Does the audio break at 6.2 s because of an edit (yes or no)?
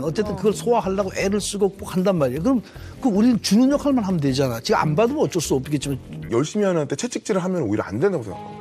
yes